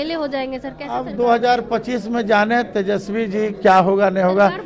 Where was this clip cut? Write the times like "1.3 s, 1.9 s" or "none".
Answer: none